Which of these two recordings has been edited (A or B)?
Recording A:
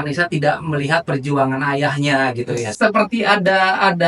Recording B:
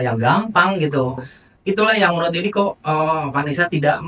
A